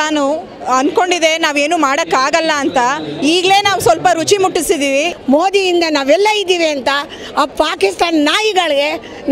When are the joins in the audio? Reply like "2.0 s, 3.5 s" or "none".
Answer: 5.1 s